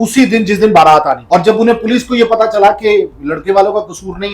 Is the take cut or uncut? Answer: cut